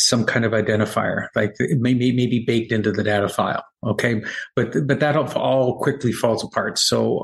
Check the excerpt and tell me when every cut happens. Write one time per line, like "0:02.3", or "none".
none